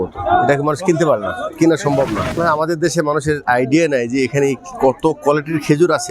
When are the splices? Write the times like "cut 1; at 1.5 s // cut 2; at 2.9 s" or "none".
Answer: cut 1; at 2.4 s